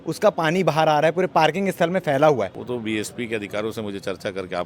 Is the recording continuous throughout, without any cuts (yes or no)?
no